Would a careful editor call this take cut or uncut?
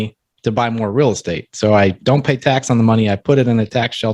uncut